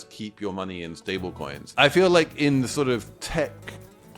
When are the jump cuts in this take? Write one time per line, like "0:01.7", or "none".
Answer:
0:01.6
0:03.2